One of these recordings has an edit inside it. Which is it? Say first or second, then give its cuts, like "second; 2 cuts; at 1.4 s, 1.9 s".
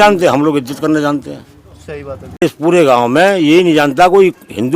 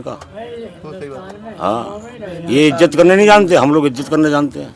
first; 1 cut; at 2.4 s